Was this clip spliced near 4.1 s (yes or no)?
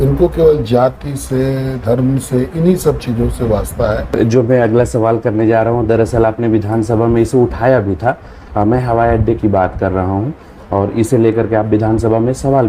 yes